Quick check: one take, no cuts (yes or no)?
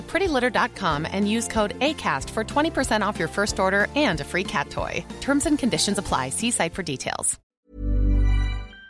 no